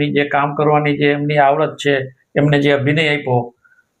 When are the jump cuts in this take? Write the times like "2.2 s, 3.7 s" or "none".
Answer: none